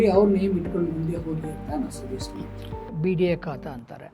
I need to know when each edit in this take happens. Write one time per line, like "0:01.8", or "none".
0:02.9